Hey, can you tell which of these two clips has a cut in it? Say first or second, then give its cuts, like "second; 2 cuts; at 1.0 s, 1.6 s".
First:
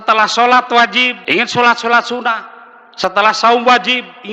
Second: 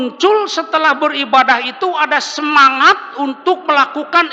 first; 1 cut; at 1.2 s